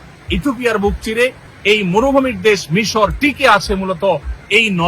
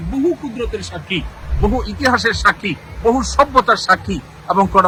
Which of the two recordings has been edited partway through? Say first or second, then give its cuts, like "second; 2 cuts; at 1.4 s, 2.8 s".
first; 1 cut; at 1.5 s